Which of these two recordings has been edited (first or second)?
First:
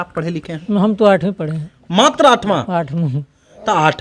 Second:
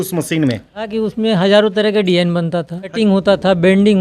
second